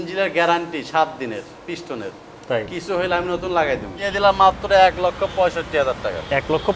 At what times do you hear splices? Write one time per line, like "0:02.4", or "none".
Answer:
0:04.1